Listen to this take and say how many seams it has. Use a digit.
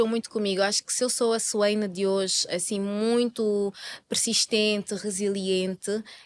0